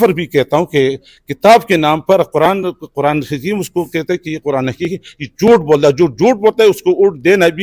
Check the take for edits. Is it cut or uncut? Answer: uncut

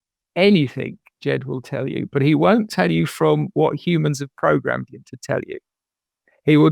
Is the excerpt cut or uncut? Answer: uncut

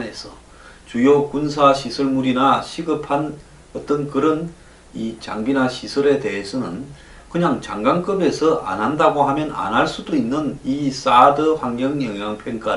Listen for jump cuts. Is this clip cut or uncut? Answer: cut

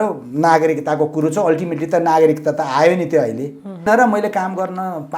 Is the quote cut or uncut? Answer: cut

